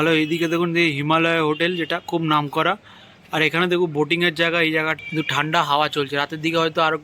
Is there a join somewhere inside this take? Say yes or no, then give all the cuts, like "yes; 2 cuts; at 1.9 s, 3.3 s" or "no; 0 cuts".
yes; 1 cut; at 5.0 s